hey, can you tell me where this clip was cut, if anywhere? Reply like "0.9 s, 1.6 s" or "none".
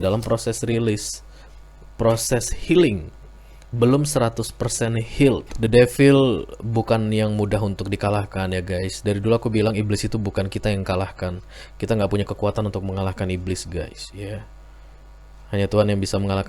5.5 s

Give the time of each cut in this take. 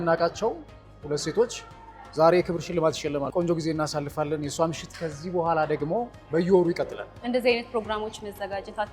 none

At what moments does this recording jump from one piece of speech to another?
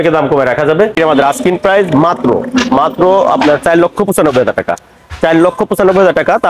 0.9 s

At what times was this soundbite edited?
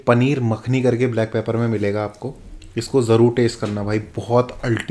none

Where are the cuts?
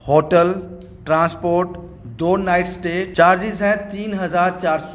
3.1 s

